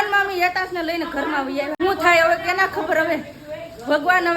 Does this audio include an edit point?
yes; 1 cut; at 1.8 s

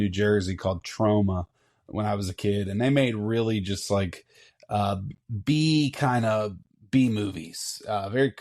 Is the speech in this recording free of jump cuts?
yes; 0 cuts

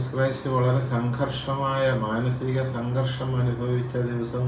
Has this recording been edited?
no; 0 cuts

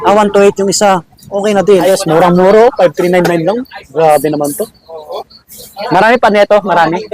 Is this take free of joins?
no; 1 cut; at 1.8 s

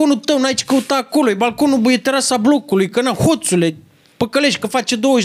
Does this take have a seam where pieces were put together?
no; 0 cuts

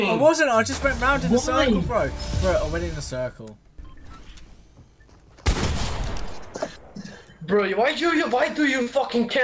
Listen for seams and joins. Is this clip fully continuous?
no; 1 cut; at 3.6 s

